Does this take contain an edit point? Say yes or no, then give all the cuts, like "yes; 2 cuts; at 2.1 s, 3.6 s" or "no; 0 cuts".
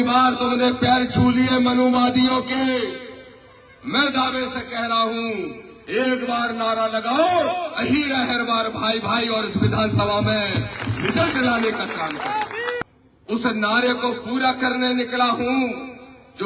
yes; 1 cut; at 12.9 s